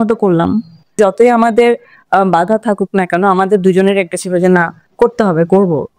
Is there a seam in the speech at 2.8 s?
no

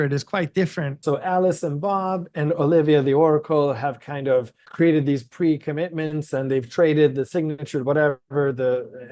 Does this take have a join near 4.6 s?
yes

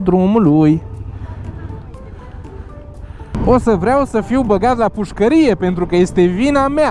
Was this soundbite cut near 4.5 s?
no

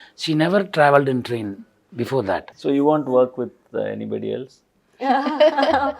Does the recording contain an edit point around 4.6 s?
no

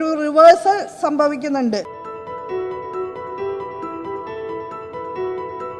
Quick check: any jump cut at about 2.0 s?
yes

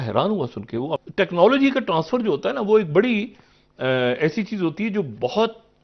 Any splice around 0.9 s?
yes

